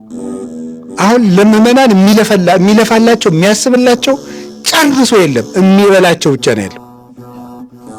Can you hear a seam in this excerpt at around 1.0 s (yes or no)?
yes